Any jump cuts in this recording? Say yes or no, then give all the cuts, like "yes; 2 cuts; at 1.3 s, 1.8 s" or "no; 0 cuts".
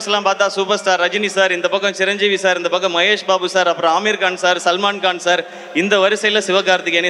no; 0 cuts